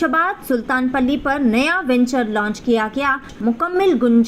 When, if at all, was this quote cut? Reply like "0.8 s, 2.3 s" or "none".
3.3 s